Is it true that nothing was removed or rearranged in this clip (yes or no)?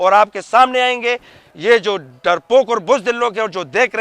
yes